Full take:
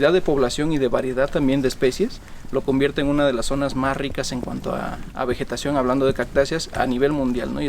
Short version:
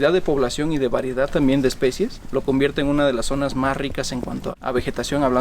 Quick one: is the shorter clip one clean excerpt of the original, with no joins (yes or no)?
no